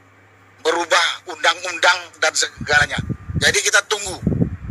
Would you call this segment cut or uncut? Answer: cut